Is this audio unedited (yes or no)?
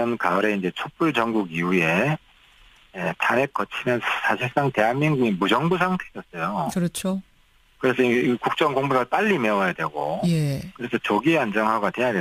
yes